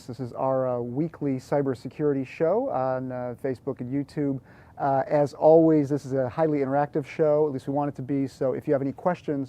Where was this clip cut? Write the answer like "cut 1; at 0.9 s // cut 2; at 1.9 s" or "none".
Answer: cut 1; at 6.1 s